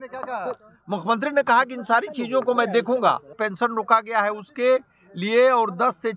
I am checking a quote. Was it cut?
yes; 1 cut; at 3.3 s

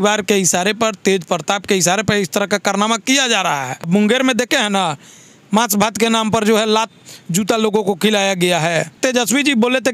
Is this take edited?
yes; 2 cuts; at 3.9 s, 9.0 s

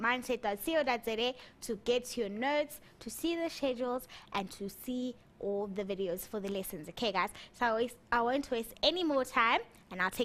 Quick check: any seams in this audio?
no; 0 cuts

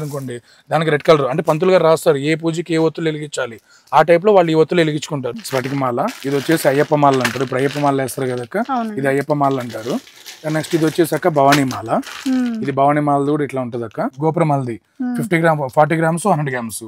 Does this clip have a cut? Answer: yes; 2 cuts; at 5.3 s, 14.1 s

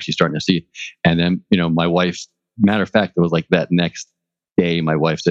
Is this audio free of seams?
yes; 0 cuts

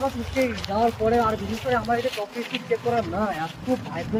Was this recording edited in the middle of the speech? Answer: no; 0 cuts

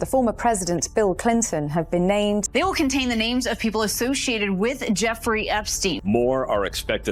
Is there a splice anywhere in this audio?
no; 0 cuts

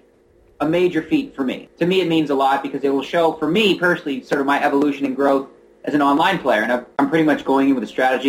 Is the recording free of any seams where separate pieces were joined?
no; 2 cuts; at 1.6 s, 6.9 s

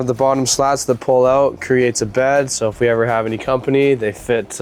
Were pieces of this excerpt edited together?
no; 0 cuts

